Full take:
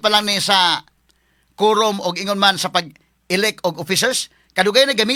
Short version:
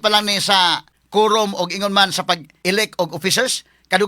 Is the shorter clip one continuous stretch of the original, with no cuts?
no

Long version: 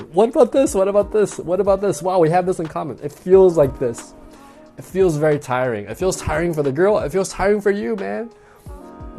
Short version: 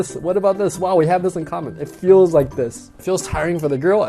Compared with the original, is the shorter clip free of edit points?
no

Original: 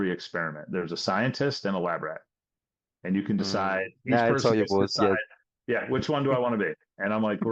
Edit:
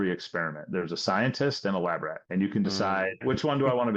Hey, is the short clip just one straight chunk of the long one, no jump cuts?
no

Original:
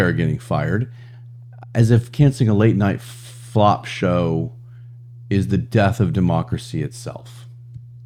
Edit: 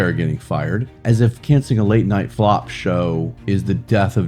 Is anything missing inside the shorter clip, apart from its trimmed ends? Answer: yes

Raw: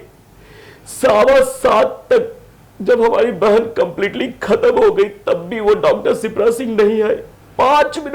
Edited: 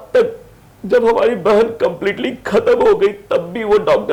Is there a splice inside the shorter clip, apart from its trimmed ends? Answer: no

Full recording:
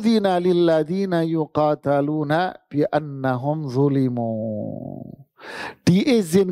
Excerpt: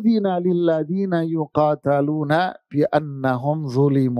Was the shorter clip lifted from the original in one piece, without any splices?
yes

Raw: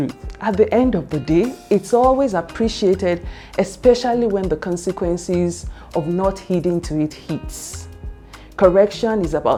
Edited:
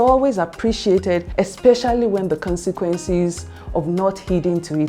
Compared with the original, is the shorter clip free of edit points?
no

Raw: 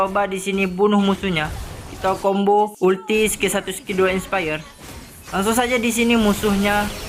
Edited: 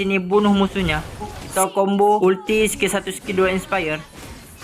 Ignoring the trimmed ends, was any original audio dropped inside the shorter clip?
yes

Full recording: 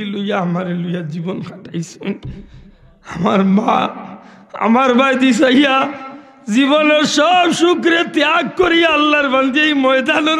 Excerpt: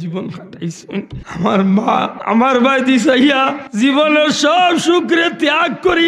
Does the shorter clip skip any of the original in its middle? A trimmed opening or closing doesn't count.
yes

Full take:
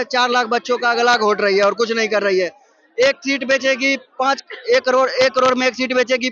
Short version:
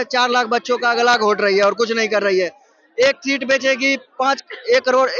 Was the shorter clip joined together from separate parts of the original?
no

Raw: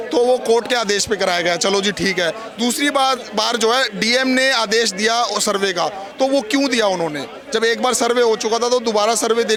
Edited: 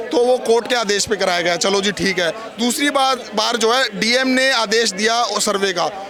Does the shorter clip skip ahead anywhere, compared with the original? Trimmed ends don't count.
no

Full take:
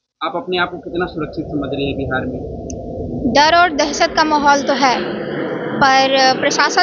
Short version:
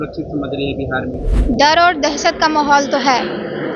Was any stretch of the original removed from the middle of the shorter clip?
yes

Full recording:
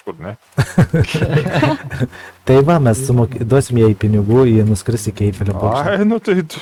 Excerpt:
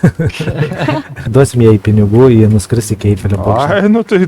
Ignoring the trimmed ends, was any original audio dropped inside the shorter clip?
yes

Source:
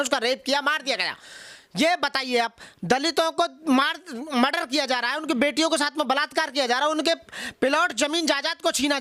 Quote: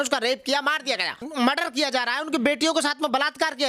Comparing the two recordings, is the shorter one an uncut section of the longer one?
no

